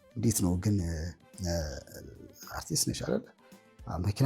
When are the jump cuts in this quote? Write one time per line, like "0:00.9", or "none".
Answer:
0:02.0